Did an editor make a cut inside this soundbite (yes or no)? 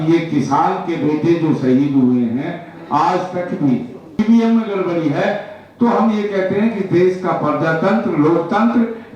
yes